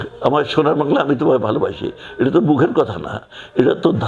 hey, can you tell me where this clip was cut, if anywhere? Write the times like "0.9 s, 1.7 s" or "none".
none